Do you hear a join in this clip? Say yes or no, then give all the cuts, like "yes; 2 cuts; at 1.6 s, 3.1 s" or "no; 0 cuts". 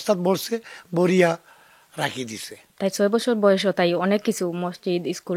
yes; 1 cut; at 2.6 s